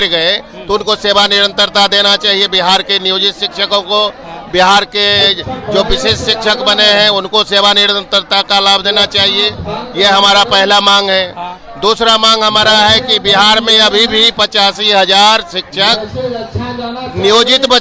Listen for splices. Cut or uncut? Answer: uncut